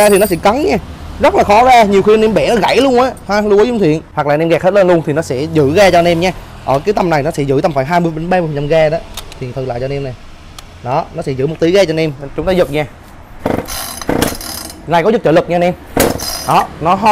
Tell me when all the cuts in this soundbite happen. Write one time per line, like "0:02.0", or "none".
0:04.1

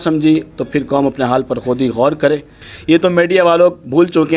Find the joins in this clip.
0:02.7

